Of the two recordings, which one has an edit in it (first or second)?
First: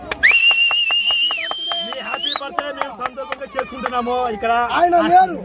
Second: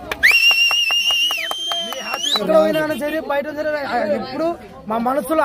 second